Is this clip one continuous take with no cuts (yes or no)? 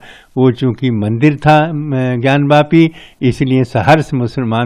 yes